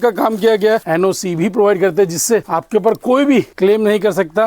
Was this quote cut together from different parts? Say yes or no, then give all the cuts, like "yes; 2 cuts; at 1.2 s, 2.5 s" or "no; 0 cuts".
yes; 3 cuts; at 0.8 s, 2.5 s, 3.5 s